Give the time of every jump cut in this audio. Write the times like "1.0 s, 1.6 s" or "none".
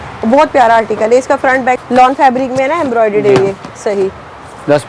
1.8 s

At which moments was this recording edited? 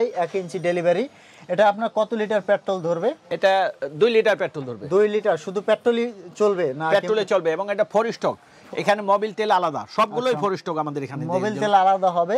none

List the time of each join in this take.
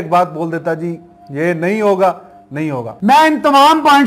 2.9 s

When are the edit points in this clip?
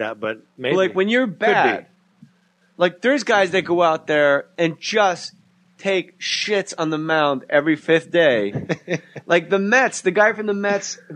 none

